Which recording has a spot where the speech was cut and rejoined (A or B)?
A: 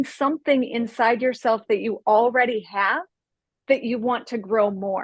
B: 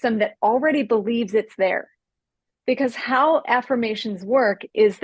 B